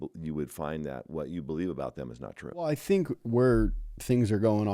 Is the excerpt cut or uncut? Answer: cut